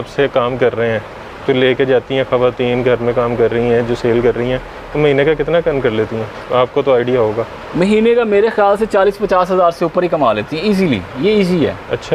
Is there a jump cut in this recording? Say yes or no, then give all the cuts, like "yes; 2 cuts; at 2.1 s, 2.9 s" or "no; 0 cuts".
no; 0 cuts